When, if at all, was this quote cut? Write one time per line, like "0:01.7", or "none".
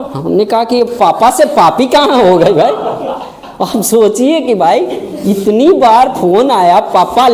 none